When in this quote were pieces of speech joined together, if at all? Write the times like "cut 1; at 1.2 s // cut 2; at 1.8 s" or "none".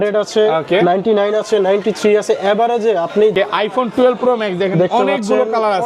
cut 1; at 3.3 s

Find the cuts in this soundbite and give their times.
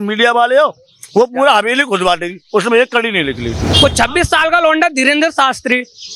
cut 1; at 3.7 s

